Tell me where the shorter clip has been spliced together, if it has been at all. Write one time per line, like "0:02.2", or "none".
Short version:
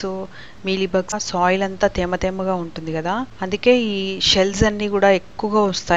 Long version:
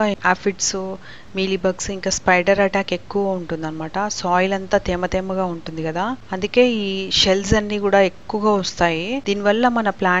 0:01.1